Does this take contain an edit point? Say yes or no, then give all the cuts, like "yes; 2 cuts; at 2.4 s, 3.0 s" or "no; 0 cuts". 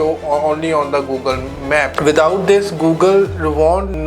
yes; 1 cut; at 2.0 s